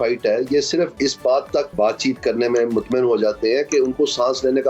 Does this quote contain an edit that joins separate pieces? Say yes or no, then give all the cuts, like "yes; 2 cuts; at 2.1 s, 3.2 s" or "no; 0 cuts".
yes; 2 cuts; at 0.9 s, 1.7 s